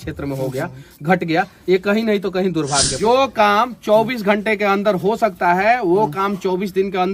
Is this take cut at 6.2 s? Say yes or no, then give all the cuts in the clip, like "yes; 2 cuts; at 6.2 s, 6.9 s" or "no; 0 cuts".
no; 1 cut; at 2.9 s